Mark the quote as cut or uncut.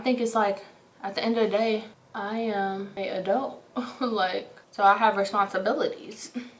cut